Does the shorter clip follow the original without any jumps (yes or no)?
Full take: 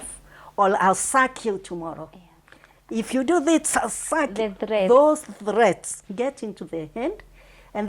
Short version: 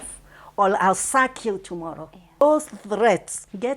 no